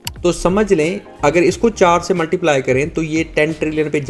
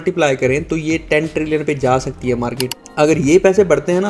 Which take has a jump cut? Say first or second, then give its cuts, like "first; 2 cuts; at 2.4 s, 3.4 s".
second; 1 cut; at 2.8 s